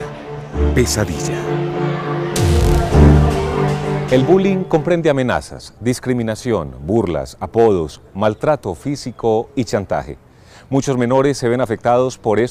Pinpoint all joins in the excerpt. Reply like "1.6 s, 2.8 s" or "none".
none